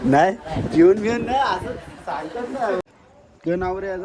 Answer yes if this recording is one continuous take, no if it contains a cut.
no